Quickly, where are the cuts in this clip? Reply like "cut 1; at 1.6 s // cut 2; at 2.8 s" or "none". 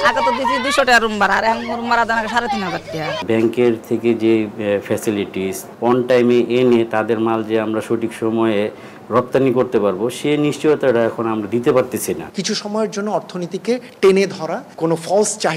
cut 1; at 3.2 s // cut 2; at 5.6 s // cut 3; at 12.3 s // cut 4; at 14.6 s

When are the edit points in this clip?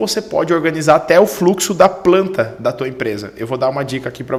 none

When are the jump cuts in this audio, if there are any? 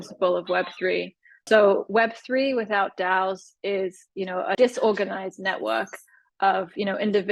none

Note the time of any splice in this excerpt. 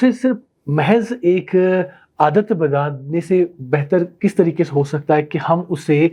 none

